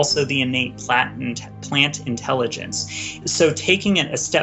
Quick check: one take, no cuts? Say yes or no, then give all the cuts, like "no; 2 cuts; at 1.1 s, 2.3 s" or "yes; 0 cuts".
no; 1 cut; at 3.2 s